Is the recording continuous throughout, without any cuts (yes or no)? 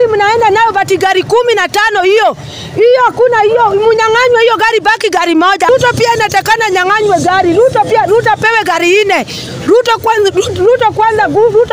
no